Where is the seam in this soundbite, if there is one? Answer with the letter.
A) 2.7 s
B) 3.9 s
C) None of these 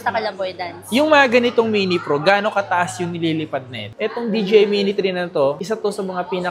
B